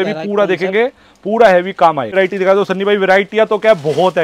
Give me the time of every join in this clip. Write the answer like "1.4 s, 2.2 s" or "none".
2.1 s